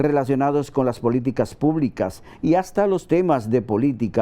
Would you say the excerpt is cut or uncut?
uncut